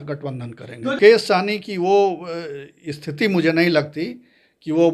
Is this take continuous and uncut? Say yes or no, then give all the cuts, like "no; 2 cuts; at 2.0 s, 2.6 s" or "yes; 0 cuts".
no; 1 cut; at 1.0 s